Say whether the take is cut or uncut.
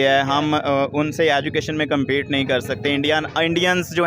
uncut